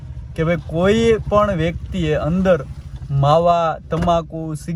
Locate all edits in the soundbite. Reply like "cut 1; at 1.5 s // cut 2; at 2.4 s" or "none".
none